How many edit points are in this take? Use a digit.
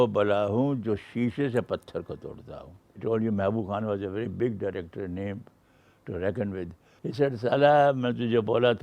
2